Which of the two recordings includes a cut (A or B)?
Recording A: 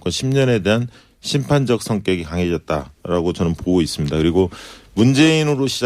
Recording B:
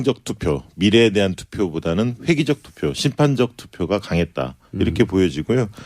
B